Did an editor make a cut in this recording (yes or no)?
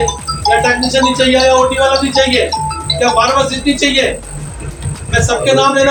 no